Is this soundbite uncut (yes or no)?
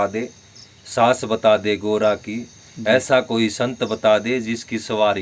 yes